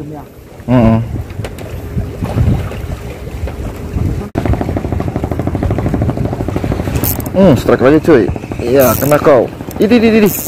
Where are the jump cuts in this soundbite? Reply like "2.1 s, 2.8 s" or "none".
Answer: 4.3 s